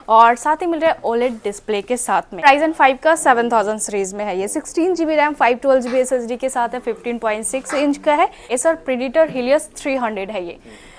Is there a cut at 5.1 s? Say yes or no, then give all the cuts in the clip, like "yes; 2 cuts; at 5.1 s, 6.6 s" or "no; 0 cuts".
no; 2 cuts; at 2.4 s, 8.4 s